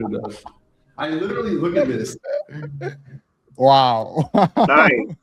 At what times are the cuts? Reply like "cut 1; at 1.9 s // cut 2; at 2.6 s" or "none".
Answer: none